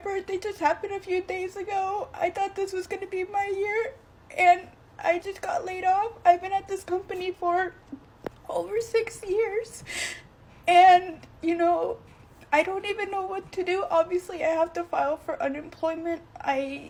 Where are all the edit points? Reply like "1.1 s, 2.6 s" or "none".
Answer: none